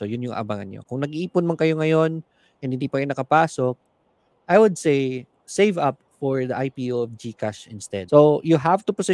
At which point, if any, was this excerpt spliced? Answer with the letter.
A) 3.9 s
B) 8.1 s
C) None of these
B